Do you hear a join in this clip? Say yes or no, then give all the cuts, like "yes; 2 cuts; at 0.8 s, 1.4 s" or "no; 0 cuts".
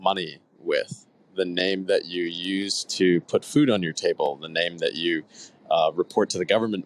no; 0 cuts